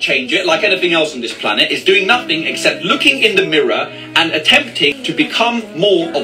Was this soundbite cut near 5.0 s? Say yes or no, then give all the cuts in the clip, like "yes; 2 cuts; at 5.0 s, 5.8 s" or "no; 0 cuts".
yes; 1 cut; at 5.0 s